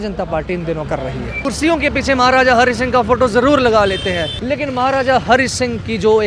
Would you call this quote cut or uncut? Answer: cut